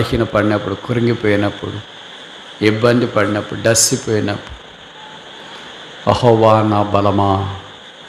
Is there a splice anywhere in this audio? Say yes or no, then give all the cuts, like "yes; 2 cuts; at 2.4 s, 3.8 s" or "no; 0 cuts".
no; 0 cuts